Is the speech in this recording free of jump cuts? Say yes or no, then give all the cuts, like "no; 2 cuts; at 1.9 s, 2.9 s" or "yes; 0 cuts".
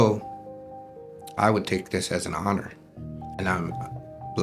no; 1 cut; at 3.3 s